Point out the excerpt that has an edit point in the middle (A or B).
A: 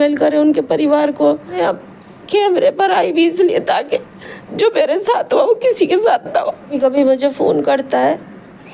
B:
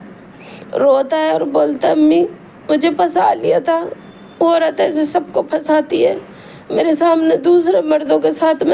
A